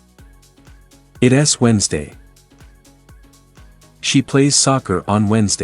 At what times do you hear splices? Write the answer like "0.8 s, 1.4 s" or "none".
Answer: 1.1 s